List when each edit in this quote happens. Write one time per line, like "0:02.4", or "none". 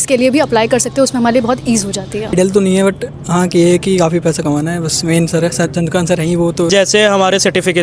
0:02.3
0:06.7

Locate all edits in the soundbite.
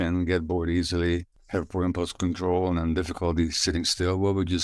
0:01.4

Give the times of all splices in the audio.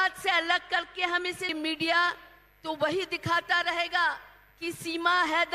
0:01.5

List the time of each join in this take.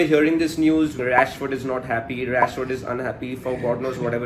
0:01.0

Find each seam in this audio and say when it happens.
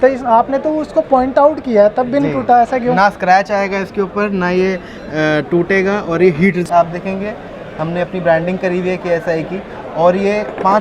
0:06.6

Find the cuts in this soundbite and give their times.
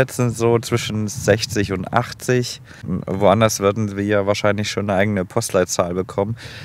0:02.9

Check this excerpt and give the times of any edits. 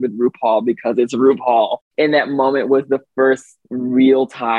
0:01.9

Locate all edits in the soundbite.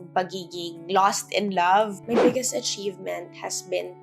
0:01.9

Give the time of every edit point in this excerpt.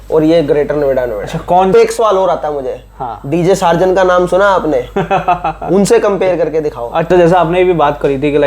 0:01.7
0:07.1

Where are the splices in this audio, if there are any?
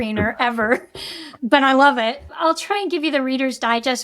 0:02.3

